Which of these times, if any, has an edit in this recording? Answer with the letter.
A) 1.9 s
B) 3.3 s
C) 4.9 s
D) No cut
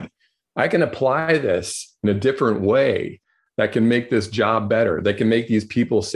D